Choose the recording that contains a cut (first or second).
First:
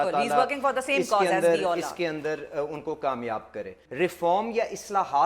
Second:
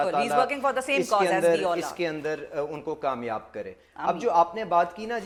first